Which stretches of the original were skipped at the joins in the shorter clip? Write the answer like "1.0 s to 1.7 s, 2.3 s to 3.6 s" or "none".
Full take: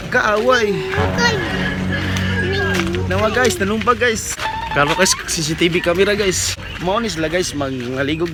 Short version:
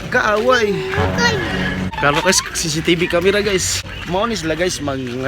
1.9 s to 4.6 s